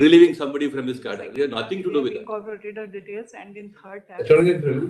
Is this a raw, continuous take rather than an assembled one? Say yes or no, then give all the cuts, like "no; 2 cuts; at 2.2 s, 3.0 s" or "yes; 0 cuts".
yes; 0 cuts